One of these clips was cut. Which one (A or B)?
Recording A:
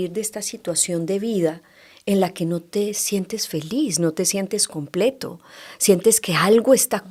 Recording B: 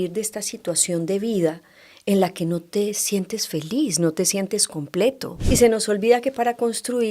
B